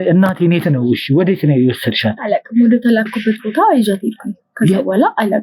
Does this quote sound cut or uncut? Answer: uncut